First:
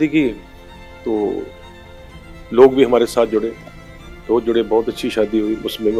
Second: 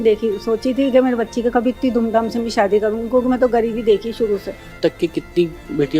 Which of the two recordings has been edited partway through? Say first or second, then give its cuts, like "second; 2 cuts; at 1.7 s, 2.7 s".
second; 1 cut; at 4.8 s